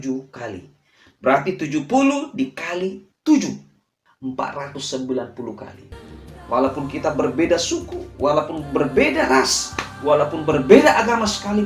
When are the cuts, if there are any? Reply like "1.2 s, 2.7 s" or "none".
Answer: 5.7 s